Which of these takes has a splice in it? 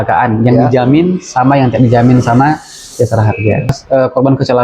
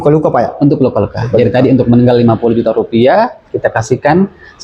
first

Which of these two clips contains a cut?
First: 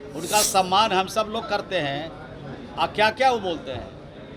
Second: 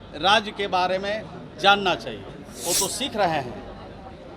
second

